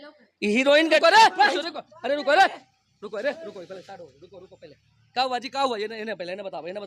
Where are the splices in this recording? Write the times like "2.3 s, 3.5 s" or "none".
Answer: 1.0 s

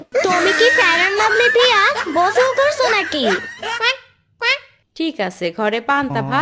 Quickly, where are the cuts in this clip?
4.8 s

